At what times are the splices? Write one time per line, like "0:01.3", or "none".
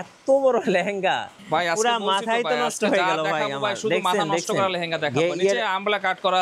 0:01.3